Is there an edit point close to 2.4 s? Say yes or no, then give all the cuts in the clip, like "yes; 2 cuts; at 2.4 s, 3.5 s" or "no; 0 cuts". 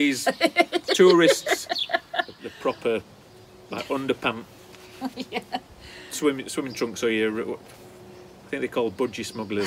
yes; 1 cut; at 2.4 s